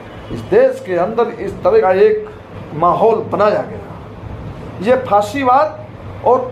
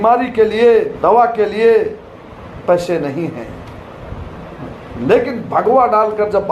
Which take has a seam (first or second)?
second